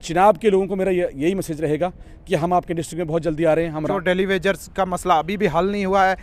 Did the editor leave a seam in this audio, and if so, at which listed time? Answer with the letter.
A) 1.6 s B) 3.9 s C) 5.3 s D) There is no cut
B